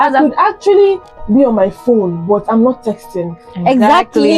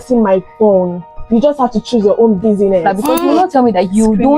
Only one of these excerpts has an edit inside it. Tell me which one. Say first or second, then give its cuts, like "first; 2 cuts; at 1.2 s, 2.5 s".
second; 1 cut; at 2.8 s